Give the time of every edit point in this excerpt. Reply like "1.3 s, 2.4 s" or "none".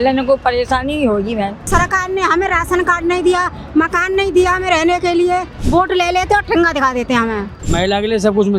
1.6 s, 5.6 s, 7.5 s

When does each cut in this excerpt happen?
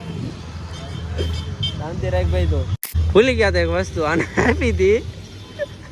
2.9 s

